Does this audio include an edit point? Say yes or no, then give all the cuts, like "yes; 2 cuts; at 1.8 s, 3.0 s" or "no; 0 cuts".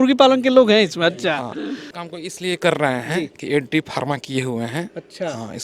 yes; 1 cut; at 1.9 s